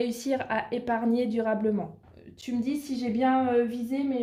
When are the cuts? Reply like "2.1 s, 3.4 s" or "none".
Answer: none